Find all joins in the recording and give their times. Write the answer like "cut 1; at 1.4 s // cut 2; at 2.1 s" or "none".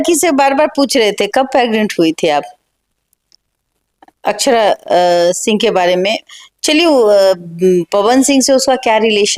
none